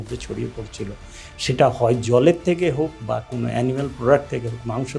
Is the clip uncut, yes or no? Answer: yes